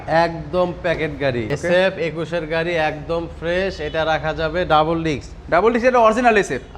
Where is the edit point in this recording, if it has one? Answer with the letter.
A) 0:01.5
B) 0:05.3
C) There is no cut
A